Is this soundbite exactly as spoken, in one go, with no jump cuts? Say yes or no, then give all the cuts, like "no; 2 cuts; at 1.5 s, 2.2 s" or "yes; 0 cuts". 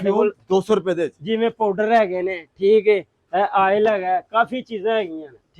yes; 0 cuts